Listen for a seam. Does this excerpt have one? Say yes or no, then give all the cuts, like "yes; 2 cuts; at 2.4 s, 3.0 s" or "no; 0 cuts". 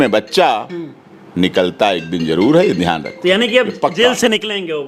no; 0 cuts